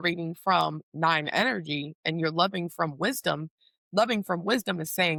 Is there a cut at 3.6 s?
no; 0 cuts

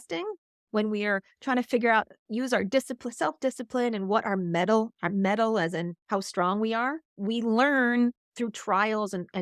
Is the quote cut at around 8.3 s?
yes; 3 cuts; at 6.0 s, 7.1 s, 8.3 s

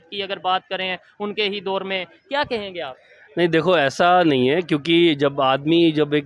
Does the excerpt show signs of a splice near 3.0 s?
no; 0 cuts

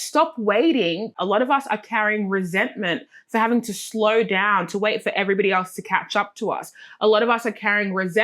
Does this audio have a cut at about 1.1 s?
yes; 1 cut; at 1.1 s

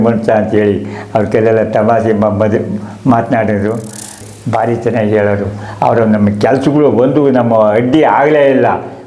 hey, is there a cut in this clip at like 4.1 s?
yes; 1 cut; at 4.1 s

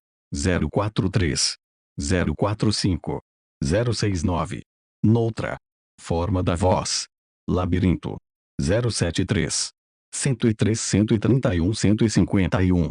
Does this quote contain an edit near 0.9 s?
no; 0 cuts

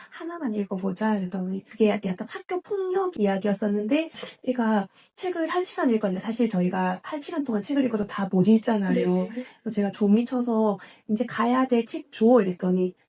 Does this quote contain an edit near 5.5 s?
no; 2 cuts; at 1.6 s, 4.2 s

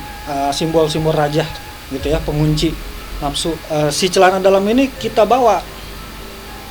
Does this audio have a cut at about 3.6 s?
yes; 1 cut; at 3.6 s

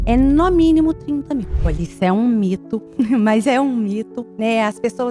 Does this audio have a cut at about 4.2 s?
yes; 3 cuts; at 1.6 s, 2.8 s, 4.2 s

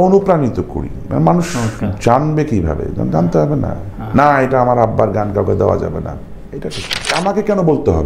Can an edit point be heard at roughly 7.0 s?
yes; 1 cut; at 7.0 s

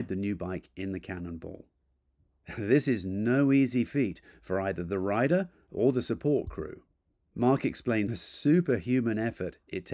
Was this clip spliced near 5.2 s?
no; 1 cut; at 8.1 s

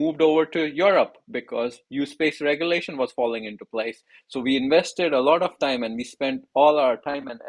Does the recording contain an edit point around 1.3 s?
no; 0 cuts

